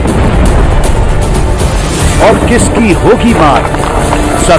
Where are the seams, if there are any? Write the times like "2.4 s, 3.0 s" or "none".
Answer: none